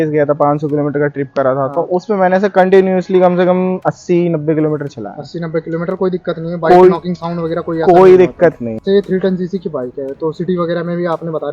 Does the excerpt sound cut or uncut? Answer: cut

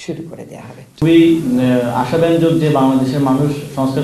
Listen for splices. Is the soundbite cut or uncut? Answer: cut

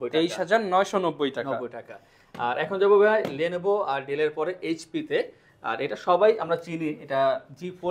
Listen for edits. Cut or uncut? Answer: uncut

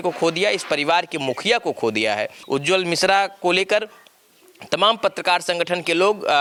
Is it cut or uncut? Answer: uncut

